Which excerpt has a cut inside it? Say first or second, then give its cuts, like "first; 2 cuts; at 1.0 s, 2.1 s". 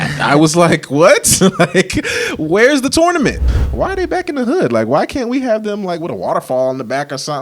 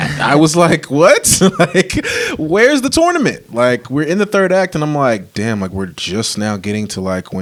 first; 1 cut; at 3.4 s